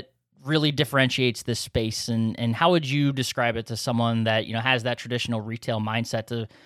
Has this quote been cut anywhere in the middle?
no; 0 cuts

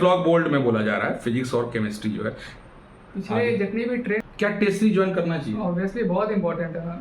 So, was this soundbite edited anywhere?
yes; 1 cut; at 4.2 s

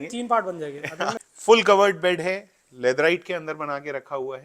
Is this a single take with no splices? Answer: no; 1 cut; at 1.1 s

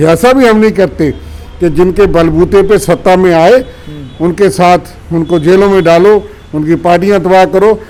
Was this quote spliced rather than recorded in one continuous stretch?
no; 0 cuts

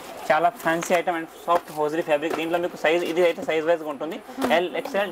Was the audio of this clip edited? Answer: no; 0 cuts

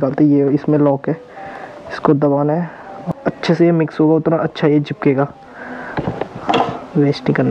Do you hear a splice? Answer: yes; 1 cut; at 3.1 s

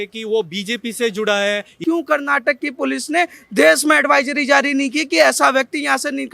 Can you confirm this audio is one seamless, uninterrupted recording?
no; 1 cut; at 1.8 s

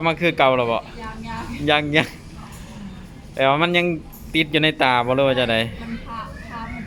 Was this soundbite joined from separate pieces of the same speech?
no; 0 cuts

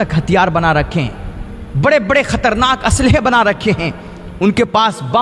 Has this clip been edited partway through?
no; 0 cuts

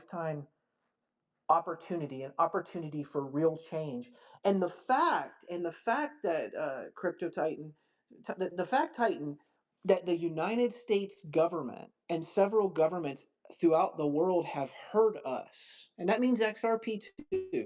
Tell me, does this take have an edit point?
no; 0 cuts

